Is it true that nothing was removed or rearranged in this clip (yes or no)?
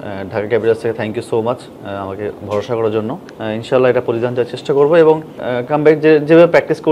no